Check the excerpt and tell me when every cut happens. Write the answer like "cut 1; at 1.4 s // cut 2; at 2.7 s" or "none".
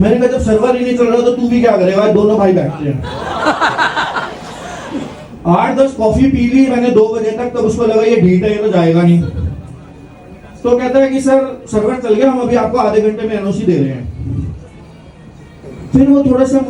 none